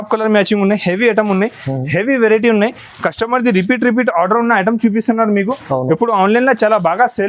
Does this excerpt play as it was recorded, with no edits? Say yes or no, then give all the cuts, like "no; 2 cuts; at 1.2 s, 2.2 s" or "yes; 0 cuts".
yes; 0 cuts